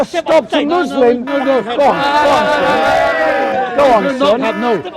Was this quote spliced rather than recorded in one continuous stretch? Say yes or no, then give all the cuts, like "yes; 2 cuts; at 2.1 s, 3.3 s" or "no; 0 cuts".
no; 0 cuts